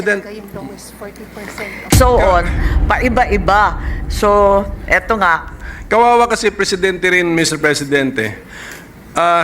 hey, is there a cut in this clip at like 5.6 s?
no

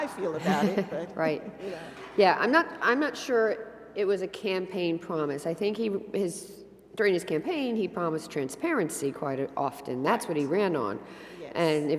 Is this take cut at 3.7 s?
yes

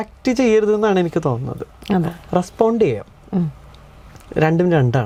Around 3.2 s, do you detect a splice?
no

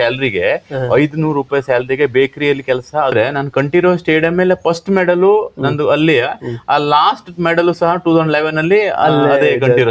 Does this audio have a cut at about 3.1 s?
yes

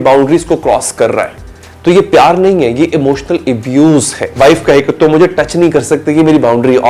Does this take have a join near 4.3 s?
yes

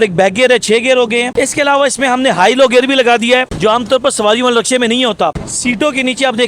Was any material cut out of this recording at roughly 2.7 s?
no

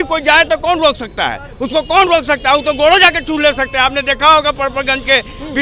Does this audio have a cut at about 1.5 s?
no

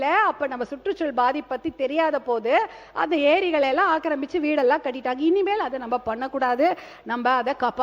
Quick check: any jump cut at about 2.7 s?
no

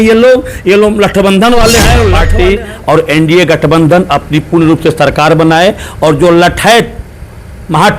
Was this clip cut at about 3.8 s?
no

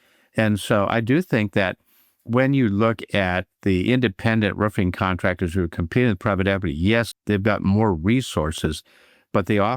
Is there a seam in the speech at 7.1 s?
yes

